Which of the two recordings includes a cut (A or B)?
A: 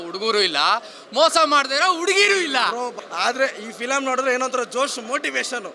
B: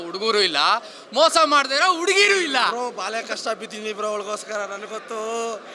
A